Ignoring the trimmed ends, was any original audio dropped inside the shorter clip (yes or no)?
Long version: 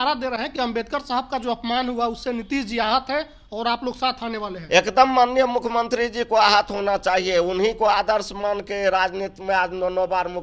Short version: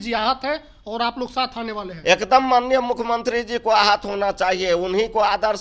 no